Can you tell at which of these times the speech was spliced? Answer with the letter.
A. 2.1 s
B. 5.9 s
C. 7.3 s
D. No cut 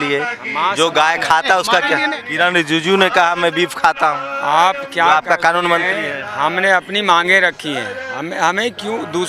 A